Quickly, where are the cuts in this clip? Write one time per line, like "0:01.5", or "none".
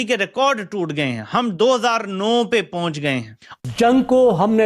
0:03.7